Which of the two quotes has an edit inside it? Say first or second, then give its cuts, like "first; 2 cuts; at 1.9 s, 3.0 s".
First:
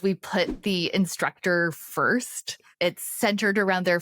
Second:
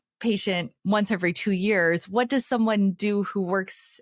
first; 1 cut; at 2.6 s